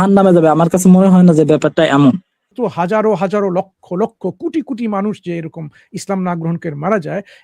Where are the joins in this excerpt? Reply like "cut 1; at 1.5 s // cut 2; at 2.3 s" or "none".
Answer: cut 1; at 2.5 s